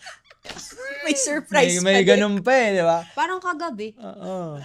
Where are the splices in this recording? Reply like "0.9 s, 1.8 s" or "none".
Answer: none